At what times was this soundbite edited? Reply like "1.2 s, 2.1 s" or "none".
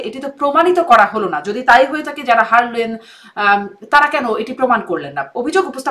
none